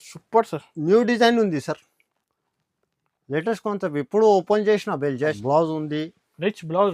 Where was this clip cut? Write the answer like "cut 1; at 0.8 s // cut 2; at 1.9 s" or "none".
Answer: cut 1; at 5.4 s